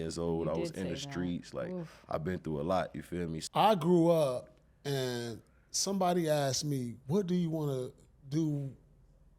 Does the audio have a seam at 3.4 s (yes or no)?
yes